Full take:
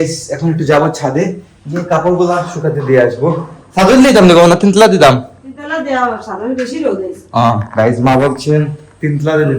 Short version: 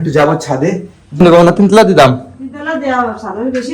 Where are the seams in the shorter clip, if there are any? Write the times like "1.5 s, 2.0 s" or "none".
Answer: 1.2 s